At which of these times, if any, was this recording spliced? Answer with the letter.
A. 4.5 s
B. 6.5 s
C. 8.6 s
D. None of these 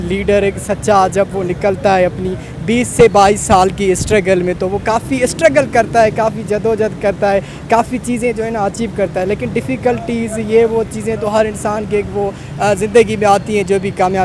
D